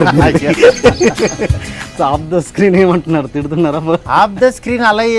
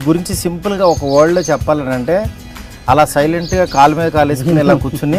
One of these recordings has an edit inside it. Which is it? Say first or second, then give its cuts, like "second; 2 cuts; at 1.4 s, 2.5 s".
first; 2 cuts; at 1.9 s, 4.0 s